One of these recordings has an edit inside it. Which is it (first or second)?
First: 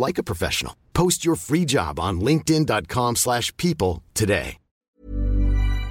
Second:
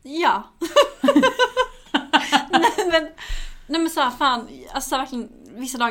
first